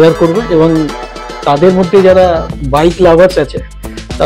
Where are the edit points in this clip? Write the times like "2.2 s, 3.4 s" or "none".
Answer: none